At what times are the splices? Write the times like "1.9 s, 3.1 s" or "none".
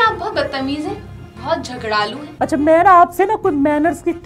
2.2 s